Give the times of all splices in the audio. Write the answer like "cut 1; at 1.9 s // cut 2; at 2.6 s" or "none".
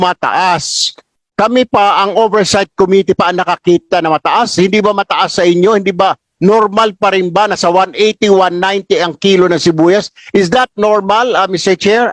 none